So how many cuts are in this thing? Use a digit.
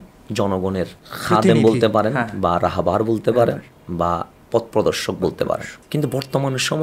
2